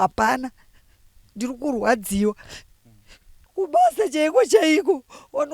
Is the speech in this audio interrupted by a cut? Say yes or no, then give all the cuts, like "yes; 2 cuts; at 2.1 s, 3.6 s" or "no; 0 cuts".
yes; 1 cut; at 3.4 s